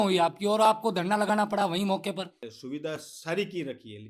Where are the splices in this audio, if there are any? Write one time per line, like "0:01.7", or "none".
0:02.4